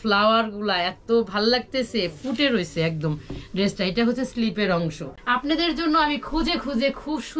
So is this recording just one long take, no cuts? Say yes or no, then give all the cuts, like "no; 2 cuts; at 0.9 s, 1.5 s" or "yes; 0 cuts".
no; 1 cut; at 5.1 s